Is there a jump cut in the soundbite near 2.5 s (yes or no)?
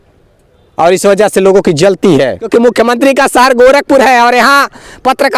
yes